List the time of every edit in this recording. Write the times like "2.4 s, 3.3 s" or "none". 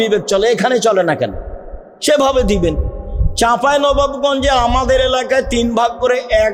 none

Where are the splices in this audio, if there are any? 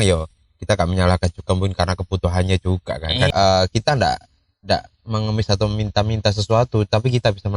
3.3 s

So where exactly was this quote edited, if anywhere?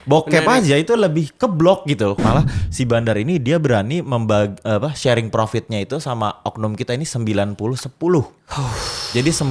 2.2 s

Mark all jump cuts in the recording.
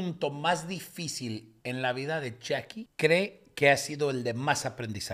1.5 s, 2.8 s

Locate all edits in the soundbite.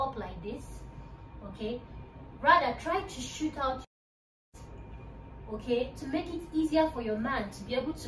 none

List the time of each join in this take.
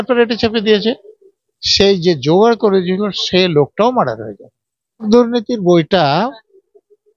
5.1 s

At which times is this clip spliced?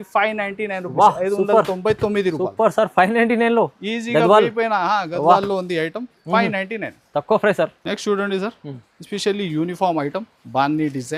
none

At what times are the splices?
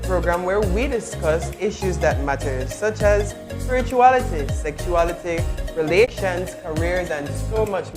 6.1 s

